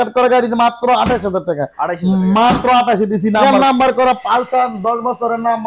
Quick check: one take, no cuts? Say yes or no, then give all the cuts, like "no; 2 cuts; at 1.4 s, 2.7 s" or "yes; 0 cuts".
no; 1 cut; at 3.4 s